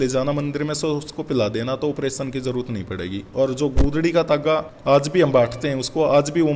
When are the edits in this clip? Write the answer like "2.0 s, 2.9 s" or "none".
none